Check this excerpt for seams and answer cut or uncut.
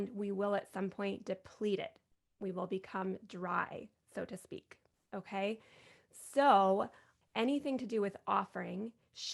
cut